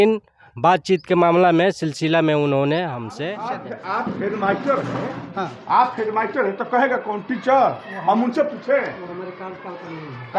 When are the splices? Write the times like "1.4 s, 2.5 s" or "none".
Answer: 3.7 s